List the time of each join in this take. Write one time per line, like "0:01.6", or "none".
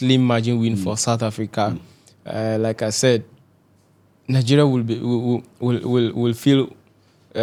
none